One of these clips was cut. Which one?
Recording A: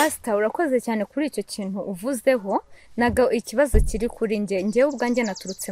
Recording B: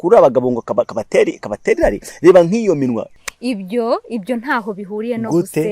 B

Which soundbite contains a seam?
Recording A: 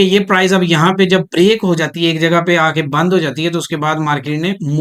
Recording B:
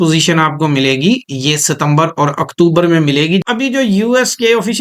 B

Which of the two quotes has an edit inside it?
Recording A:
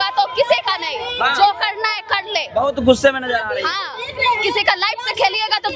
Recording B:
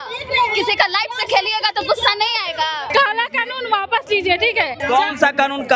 B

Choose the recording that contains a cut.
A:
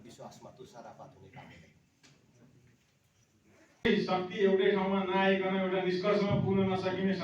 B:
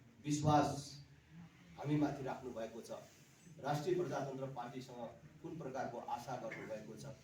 A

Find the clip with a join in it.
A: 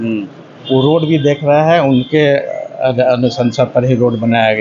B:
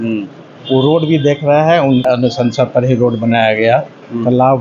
B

